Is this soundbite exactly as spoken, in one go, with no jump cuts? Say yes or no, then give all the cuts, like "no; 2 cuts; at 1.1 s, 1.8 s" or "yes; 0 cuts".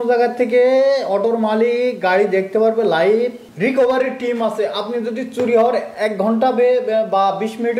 no; 1 cut; at 3.4 s